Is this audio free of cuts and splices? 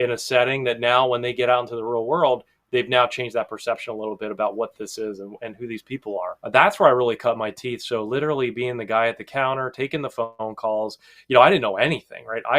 no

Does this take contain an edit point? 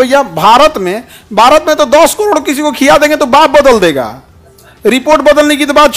no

